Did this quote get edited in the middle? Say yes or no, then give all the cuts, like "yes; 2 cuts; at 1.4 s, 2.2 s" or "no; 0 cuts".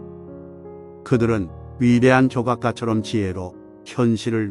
yes; 1 cut; at 1.1 s